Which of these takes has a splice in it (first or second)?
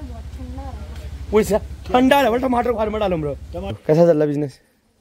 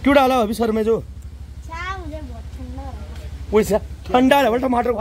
first